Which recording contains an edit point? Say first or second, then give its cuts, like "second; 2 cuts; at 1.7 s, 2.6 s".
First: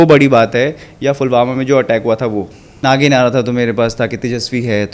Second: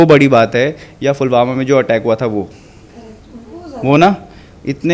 first; 1 cut; at 2.8 s